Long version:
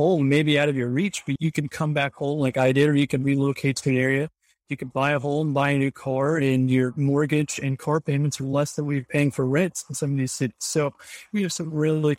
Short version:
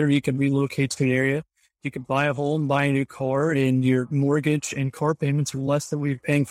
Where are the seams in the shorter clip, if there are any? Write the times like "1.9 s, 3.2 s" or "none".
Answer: none